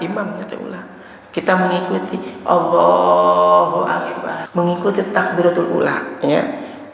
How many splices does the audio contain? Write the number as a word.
one